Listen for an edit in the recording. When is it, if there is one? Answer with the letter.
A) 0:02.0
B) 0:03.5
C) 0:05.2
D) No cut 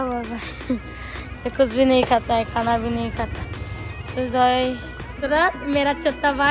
C